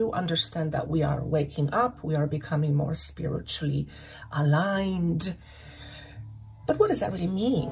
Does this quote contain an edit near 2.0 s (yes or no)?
no